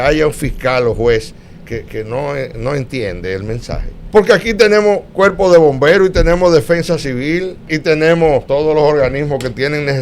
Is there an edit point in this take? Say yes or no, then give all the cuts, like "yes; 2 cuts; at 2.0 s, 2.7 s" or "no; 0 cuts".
yes; 3 cuts; at 3.9 s, 7.7 s, 8.5 s